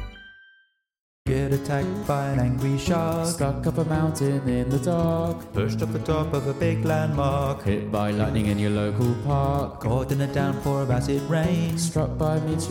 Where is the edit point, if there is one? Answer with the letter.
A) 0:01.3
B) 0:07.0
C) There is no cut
A